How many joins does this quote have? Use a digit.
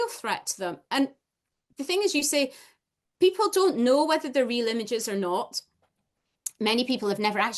0